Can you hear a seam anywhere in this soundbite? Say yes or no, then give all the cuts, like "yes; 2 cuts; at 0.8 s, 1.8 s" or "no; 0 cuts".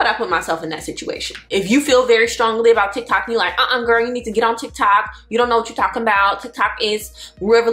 no; 0 cuts